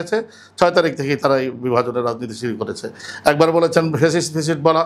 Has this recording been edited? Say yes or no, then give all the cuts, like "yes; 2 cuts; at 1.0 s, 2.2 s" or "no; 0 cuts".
no; 0 cuts